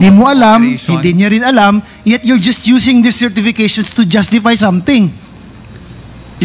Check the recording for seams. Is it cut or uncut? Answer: uncut